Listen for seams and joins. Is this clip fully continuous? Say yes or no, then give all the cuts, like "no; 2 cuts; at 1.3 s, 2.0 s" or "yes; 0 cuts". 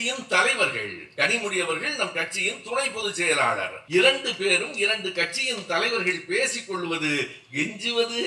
no; 1 cut; at 3.7 s